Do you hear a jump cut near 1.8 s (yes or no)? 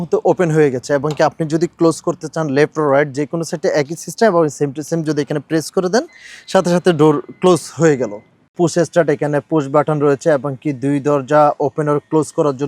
no